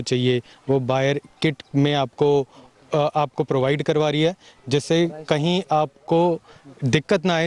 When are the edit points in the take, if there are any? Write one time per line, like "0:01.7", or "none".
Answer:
none